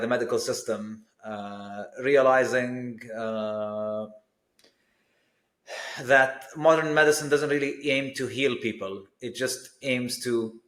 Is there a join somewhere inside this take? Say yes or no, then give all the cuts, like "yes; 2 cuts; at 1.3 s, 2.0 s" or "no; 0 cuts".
no; 0 cuts